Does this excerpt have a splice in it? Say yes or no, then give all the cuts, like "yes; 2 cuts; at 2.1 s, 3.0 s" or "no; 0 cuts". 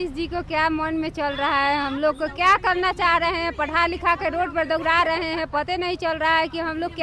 no; 0 cuts